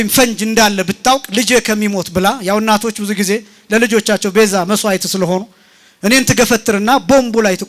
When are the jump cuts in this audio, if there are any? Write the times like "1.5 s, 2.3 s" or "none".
none